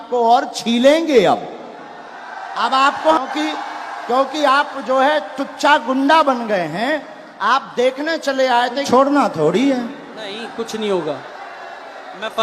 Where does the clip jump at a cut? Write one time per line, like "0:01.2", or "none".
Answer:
0:03.2
0:08.9

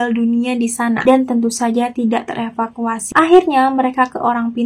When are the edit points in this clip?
0:03.0

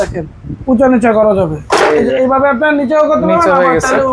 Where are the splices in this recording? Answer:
none

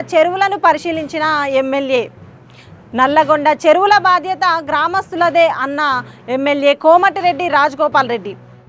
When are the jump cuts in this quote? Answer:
none

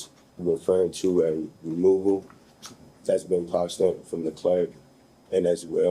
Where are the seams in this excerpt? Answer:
none

